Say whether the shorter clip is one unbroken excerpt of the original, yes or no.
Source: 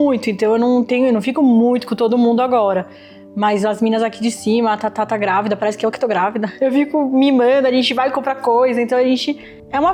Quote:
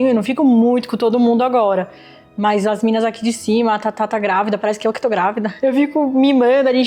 yes